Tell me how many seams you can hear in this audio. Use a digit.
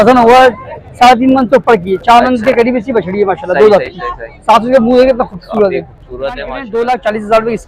1